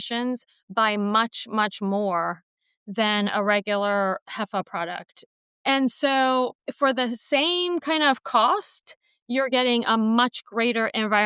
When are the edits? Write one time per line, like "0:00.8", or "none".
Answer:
0:05.3